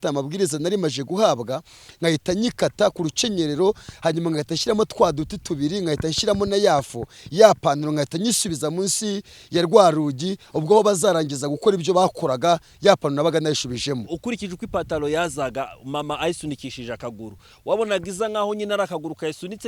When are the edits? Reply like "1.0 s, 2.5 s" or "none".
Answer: none